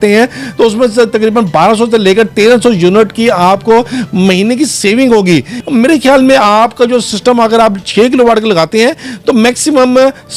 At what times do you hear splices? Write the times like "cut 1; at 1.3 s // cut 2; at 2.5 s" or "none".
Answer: none